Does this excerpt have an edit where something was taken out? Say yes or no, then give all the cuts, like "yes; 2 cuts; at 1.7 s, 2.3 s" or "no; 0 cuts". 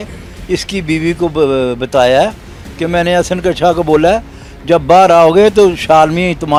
no; 0 cuts